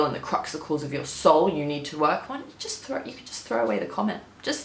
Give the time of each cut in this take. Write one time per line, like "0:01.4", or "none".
none